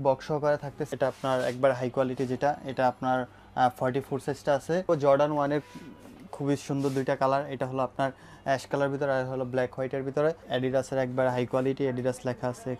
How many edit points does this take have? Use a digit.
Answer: 3